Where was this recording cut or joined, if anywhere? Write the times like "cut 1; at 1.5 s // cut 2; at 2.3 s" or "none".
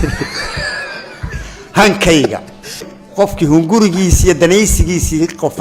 cut 1; at 3.0 s